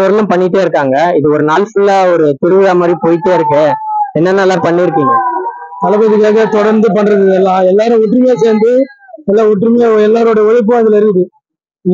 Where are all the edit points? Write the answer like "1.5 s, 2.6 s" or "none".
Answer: none